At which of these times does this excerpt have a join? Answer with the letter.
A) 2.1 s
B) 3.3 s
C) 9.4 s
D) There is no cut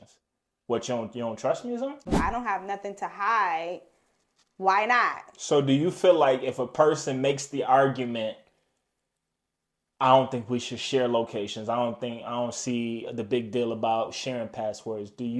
A